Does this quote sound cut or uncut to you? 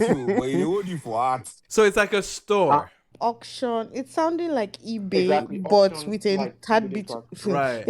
cut